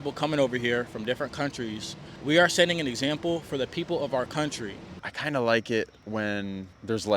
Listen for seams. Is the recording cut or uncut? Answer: cut